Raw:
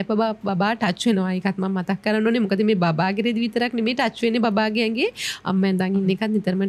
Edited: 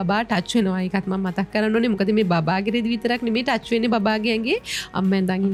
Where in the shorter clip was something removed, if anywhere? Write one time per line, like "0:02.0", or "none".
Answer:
none